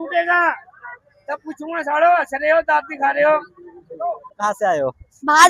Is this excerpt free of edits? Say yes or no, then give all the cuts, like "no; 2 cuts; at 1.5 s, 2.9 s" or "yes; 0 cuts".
no; 1 cut; at 4.3 s